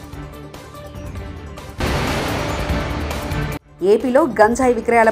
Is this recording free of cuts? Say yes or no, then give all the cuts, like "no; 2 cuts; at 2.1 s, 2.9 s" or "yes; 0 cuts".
yes; 0 cuts